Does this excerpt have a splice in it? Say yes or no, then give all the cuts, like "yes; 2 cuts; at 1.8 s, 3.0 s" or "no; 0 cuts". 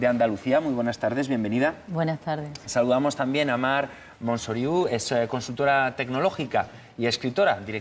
yes; 1 cut; at 1.1 s